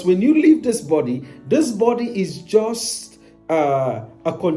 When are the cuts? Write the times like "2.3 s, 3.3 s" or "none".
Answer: none